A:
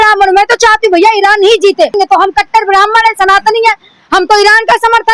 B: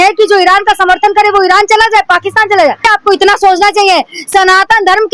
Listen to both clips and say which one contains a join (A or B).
A